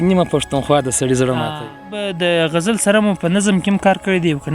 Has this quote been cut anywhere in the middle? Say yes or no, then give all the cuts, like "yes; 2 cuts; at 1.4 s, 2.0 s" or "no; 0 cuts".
yes; 1 cut; at 2.0 s